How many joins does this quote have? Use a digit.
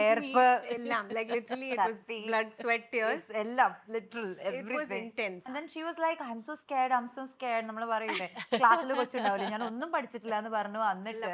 1